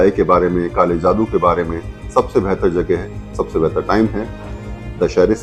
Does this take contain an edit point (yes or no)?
no